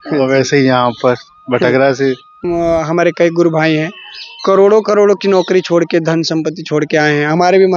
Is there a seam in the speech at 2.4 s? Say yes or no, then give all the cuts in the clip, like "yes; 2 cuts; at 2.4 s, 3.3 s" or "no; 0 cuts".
yes; 1 cut; at 2.4 s